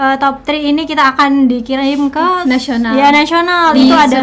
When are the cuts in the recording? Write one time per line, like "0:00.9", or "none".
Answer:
none